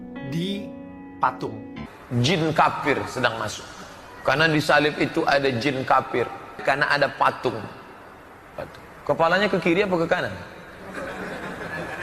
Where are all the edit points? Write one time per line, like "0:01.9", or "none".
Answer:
0:01.7
0:06.5